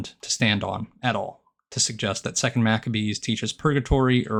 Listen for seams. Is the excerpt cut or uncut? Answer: uncut